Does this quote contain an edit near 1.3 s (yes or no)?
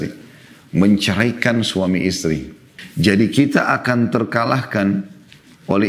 no